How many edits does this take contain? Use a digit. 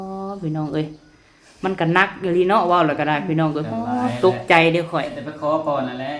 1